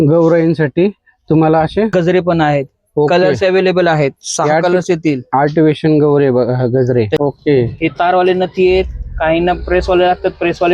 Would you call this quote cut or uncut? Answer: cut